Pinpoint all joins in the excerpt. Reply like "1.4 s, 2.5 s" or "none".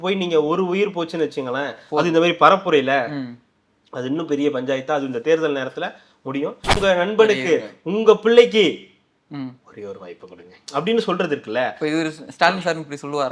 6.8 s